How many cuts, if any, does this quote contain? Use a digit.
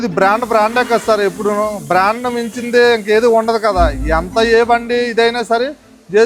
0